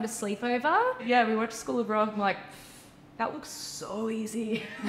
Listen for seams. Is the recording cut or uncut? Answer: cut